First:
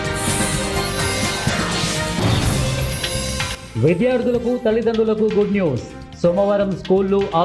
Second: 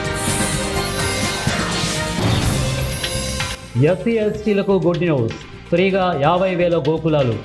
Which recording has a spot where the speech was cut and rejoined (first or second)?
first